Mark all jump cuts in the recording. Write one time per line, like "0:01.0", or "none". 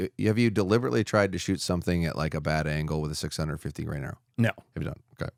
none